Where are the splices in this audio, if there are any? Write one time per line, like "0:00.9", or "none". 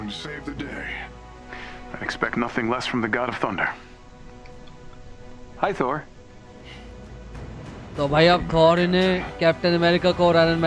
none